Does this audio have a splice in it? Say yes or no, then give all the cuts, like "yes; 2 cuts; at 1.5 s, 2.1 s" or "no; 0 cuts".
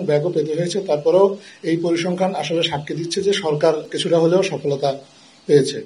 yes; 1 cut; at 3.9 s